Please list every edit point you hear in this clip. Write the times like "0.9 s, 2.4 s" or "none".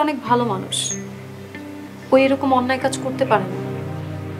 3.5 s

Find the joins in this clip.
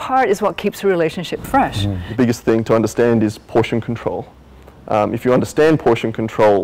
2.1 s

